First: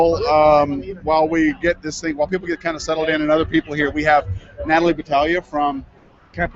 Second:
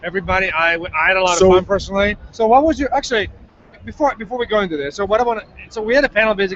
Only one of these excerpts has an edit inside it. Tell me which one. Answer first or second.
first